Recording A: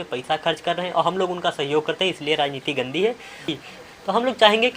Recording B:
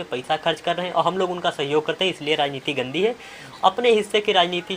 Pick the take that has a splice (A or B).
A